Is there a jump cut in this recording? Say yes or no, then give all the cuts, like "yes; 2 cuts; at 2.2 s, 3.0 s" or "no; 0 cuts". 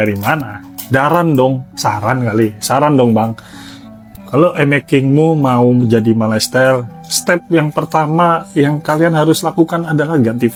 no; 0 cuts